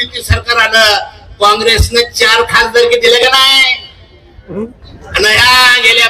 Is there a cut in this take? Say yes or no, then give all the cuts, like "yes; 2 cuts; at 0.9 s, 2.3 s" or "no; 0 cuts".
yes; 1 cut; at 4.8 s